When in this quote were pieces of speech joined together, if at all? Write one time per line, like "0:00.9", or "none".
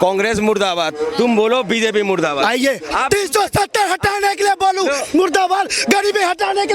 0:02.8